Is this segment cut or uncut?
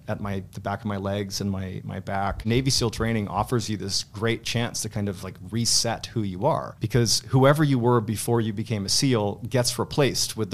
cut